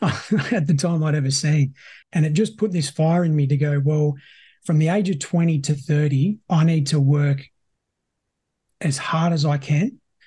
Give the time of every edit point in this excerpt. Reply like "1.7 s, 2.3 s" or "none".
2.0 s